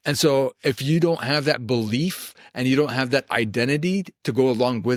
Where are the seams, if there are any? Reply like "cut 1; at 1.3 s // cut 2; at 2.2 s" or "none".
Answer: none